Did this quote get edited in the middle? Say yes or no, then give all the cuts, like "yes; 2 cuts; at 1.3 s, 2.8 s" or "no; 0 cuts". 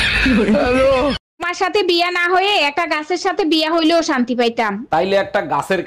no; 0 cuts